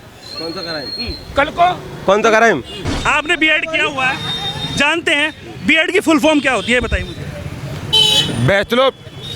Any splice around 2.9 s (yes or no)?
yes